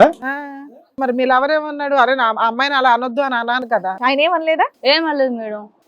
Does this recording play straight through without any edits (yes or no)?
no